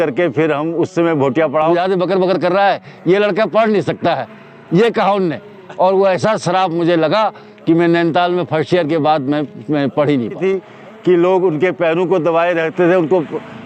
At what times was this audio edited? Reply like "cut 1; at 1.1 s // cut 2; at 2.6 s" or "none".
cut 1; at 1.7 s // cut 2; at 10.4 s